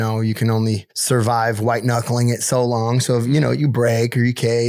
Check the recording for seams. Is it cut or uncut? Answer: cut